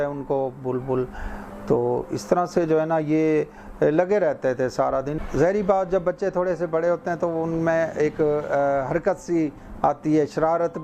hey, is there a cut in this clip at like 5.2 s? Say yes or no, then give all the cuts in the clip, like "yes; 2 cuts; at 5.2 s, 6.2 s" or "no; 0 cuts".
yes; 1 cut; at 5.2 s